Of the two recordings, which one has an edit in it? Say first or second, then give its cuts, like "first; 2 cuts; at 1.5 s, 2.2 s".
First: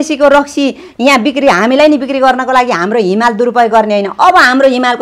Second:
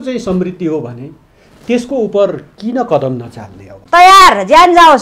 second; 1 cut; at 3.6 s